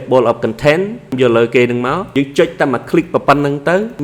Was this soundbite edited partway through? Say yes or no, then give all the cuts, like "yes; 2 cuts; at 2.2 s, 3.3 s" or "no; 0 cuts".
yes; 2 cuts; at 1.1 s, 2.0 s